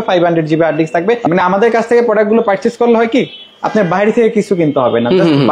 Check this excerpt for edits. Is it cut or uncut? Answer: cut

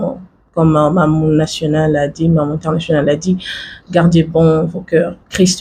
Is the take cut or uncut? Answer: uncut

